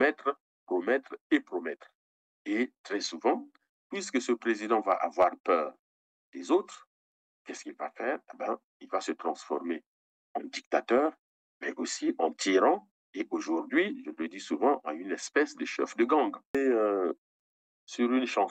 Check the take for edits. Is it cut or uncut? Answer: cut